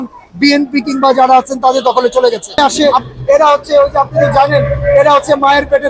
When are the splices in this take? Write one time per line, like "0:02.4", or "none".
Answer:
0:02.6